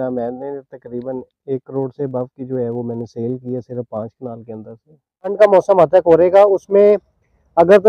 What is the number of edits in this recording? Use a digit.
1